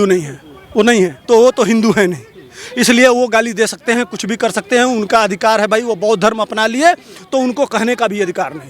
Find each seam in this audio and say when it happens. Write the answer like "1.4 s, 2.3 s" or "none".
1.2 s